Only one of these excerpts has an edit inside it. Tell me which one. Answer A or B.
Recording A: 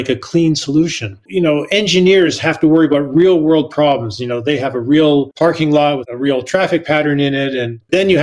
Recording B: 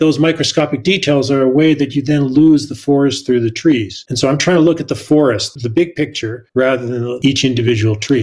B